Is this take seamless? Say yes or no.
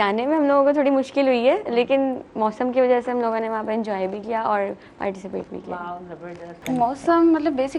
no